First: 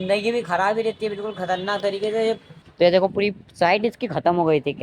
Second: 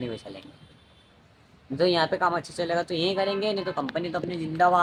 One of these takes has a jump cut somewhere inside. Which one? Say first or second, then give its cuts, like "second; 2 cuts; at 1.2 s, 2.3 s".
first; 1 cut; at 2.6 s